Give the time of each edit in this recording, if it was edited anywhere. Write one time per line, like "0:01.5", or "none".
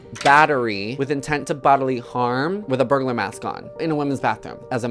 0:00.9
0:02.6

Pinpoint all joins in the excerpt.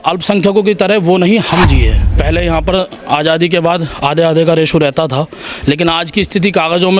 0:02.1

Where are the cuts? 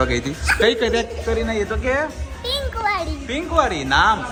none

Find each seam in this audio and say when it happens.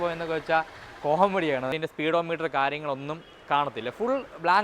0:01.7

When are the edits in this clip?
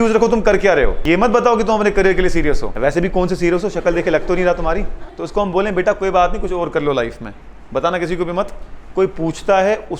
0:01.0
0:02.7
0:05.0

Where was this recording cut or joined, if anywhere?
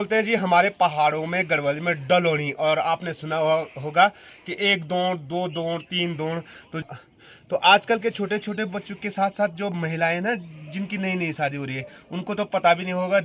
0:06.9

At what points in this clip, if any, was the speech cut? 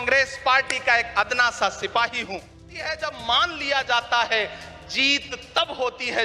0:02.8

